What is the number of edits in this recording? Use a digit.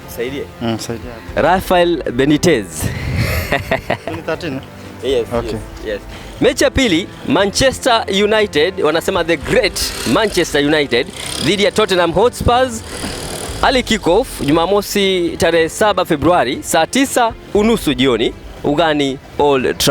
1